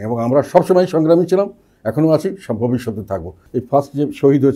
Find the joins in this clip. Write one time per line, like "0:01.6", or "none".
0:03.4

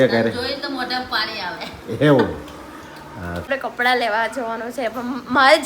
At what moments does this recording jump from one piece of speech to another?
0:03.5

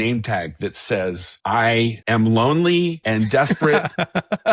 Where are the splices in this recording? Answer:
0:01.3
0:02.0
0:03.0

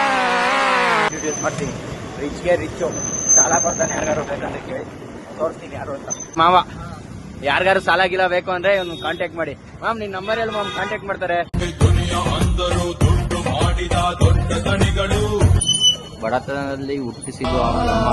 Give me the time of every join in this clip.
0:01.1
0:06.4
0:11.6
0:15.6

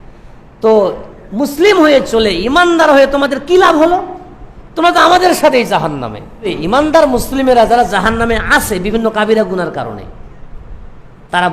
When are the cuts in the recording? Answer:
0:06.5

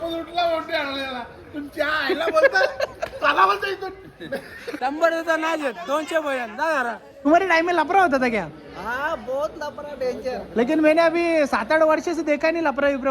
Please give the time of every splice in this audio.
0:04.6
0:07.3

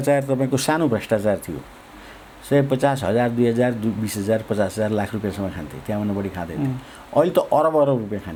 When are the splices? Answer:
none

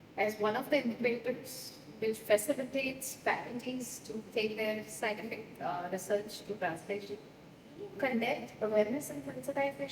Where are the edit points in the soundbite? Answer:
0:07.8

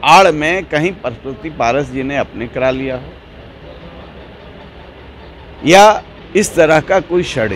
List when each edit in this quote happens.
0:06.1

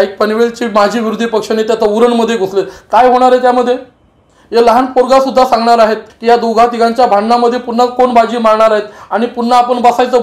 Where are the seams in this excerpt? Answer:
0:06.1

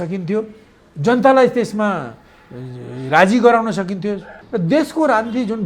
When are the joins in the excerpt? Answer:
0:04.4

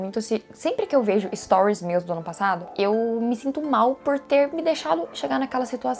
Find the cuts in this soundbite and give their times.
none

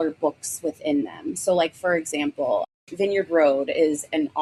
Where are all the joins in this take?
none

